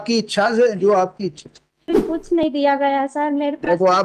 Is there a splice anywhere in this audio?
yes; 1 cut; at 2.0 s

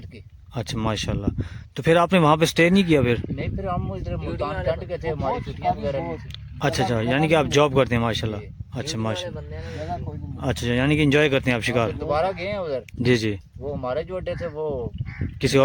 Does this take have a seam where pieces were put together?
no; 0 cuts

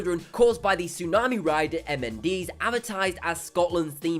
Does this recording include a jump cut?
yes; 1 cut; at 1.4 s

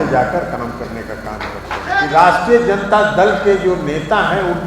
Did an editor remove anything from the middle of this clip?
yes; 1 cut; at 2.0 s

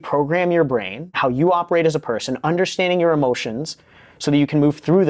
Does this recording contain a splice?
yes; 1 cut; at 1.2 s

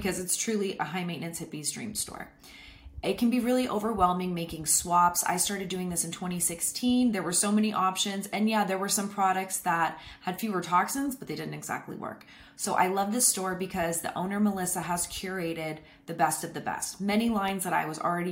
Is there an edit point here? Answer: no; 0 cuts

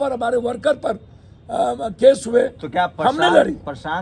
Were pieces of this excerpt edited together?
no; 0 cuts

